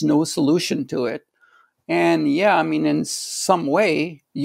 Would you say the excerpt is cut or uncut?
uncut